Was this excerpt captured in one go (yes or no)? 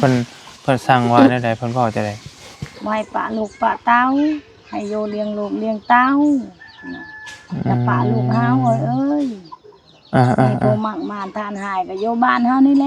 yes